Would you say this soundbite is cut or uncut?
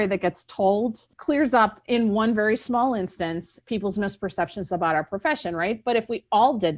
cut